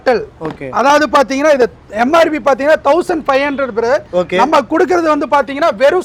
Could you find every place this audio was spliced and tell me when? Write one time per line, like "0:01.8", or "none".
none